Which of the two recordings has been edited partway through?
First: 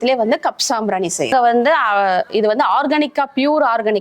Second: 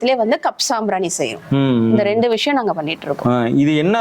first; 1 cut; at 1.3 s

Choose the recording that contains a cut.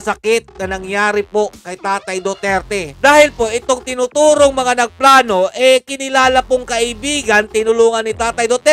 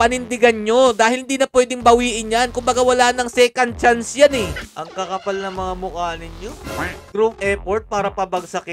second; 1 cut; at 4.7 s

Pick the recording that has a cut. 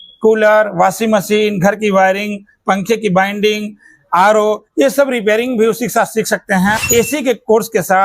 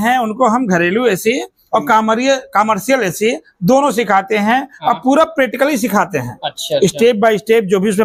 first; 1 cut; at 6.8 s

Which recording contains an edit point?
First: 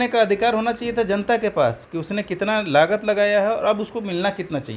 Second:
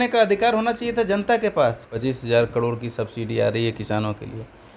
second; 1 cut; at 1.9 s

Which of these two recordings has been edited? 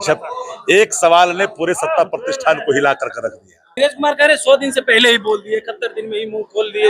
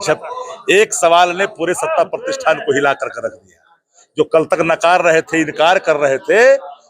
first; 1 cut; at 3.6 s

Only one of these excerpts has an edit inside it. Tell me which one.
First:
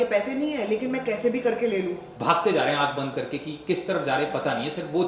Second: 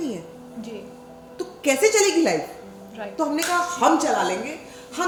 first; 1 cut; at 2.0 s

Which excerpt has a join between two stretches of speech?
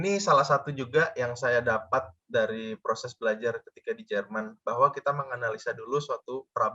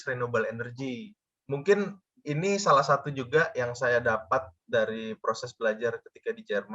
second; 1 cut; at 1.3 s

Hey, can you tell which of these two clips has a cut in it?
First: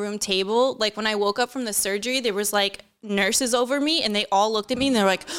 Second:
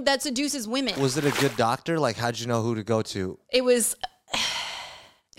second; 1 cut; at 0.9 s

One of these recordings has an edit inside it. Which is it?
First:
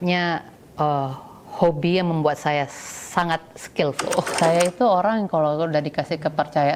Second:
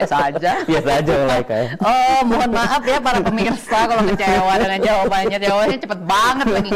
first; 1 cut; at 4.3 s

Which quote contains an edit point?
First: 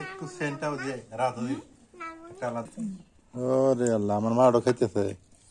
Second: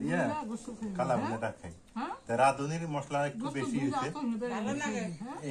first; 1 cut; at 2.7 s

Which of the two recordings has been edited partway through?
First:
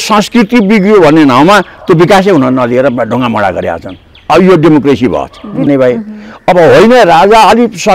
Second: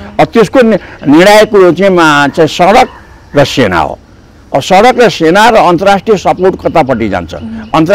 first; 1 cut; at 5.7 s

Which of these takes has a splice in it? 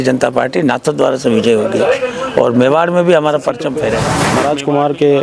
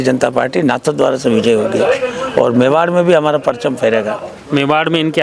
first; 1 cut; at 4.2 s

